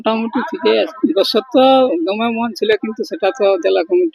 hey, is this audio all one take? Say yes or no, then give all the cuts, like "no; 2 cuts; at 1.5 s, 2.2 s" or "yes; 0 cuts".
no; 1 cut; at 0.9 s